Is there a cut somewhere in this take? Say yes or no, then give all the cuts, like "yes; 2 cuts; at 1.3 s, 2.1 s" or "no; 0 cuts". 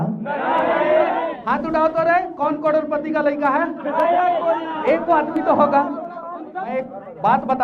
yes; 1 cut; at 6.6 s